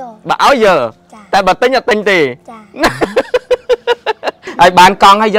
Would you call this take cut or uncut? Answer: cut